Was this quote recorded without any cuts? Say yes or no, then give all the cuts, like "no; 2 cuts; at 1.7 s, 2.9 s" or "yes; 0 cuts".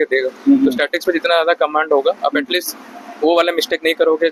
yes; 0 cuts